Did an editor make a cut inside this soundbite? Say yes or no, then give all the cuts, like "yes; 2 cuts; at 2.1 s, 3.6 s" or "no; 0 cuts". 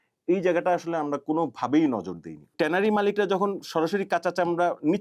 yes; 1 cut; at 2.5 s